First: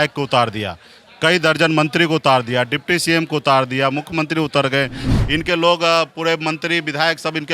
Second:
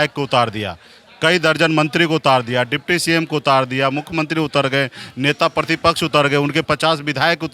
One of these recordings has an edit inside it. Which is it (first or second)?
first